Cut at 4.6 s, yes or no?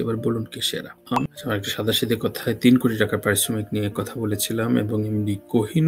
no